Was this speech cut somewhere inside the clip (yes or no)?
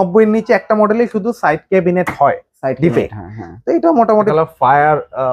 yes